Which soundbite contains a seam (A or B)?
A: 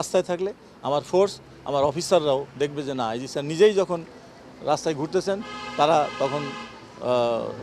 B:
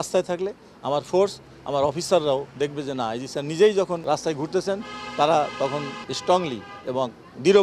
B